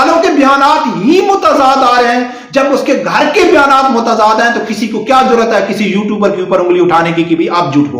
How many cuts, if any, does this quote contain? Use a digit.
0